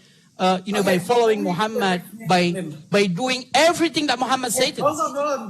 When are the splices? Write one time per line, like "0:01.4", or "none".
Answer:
none